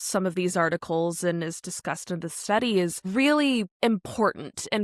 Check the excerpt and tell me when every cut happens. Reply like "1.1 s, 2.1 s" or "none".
3.0 s, 3.7 s